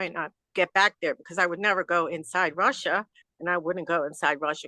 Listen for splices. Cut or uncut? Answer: uncut